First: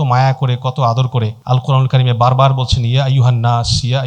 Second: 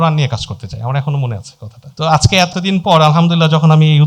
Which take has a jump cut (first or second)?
second